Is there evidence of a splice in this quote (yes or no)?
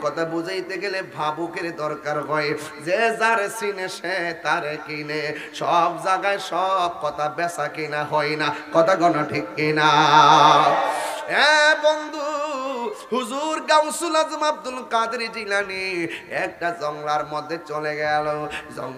no